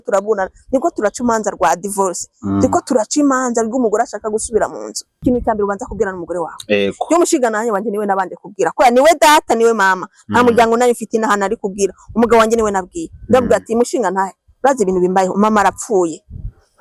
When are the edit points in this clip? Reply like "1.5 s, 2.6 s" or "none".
5.0 s